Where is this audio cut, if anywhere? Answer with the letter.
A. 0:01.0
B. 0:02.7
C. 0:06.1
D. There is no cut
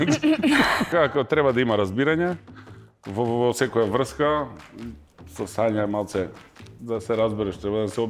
A